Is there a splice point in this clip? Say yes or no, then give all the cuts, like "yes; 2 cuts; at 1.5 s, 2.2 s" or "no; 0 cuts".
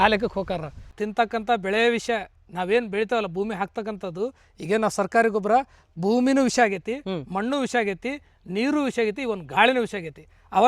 yes; 1 cut; at 1.0 s